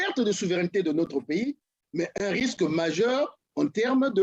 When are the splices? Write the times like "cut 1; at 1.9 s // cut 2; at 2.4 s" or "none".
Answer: none

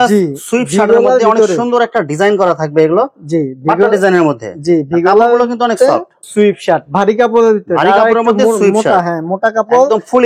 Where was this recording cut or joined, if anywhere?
cut 1; at 6.2 s

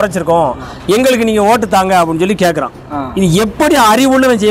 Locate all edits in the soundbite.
none

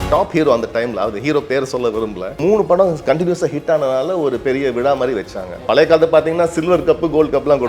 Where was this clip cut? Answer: cut 1; at 2.4 s // cut 2; at 5.6 s

